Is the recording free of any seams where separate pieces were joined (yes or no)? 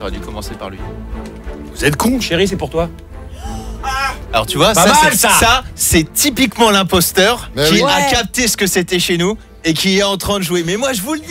no